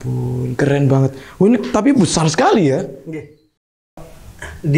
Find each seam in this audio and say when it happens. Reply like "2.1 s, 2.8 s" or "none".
3.8 s